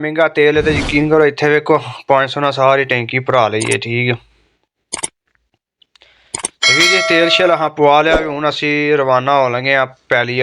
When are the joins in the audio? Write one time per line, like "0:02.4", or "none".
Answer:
none